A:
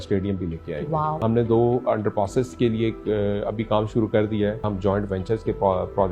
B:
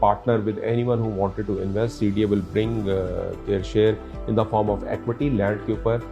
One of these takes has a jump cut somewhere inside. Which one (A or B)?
A